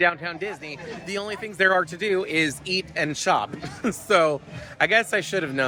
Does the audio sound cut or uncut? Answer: uncut